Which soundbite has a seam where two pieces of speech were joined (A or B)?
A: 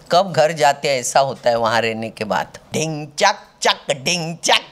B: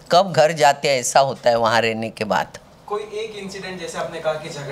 A